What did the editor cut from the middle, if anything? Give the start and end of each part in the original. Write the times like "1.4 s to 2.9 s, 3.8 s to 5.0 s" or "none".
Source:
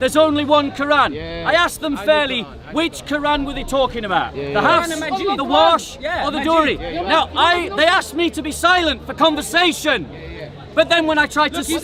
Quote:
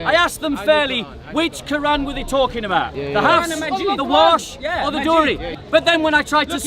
6.9 s to 10.5 s